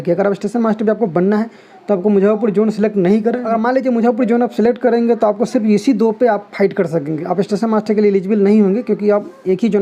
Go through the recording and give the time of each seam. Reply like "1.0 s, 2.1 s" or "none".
3.4 s